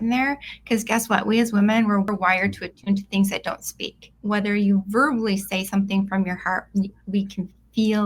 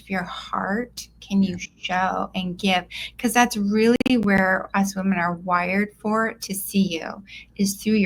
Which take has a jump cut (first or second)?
first